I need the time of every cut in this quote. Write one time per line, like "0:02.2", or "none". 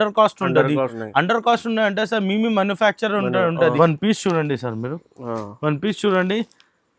0:01.0
0:03.8